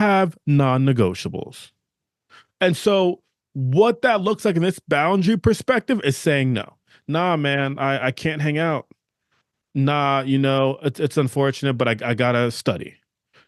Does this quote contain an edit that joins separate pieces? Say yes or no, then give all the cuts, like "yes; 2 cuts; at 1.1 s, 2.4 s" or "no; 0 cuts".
no; 0 cuts